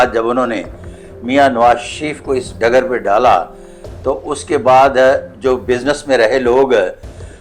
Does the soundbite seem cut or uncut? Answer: uncut